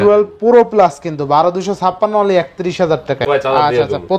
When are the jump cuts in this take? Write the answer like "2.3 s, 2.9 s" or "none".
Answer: 3.3 s